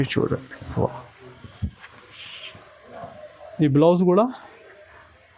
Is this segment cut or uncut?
uncut